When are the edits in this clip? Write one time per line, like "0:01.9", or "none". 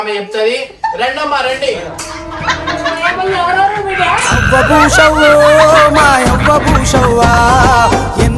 none